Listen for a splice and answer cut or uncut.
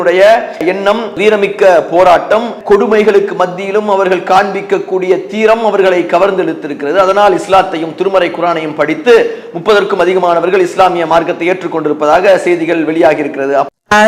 uncut